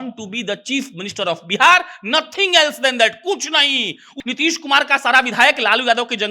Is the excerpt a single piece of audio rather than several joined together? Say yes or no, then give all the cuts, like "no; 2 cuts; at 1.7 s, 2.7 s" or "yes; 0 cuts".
no; 1 cut; at 4.1 s